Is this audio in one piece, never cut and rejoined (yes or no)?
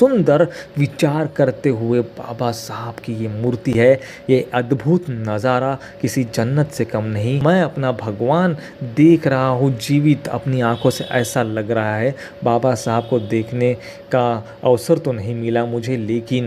yes